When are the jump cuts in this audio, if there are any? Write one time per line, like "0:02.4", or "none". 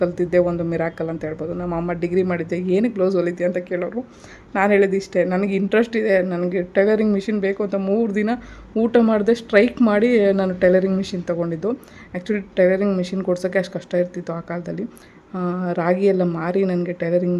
none